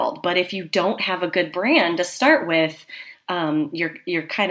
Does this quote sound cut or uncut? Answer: uncut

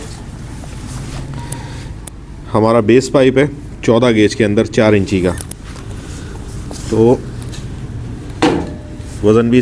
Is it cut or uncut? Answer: uncut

